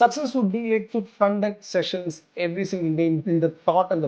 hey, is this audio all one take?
no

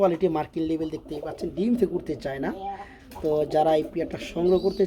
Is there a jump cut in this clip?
no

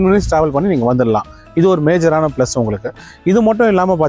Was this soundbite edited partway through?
no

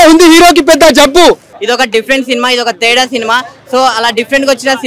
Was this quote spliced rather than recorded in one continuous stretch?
yes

